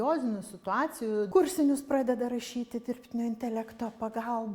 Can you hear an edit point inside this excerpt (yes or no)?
yes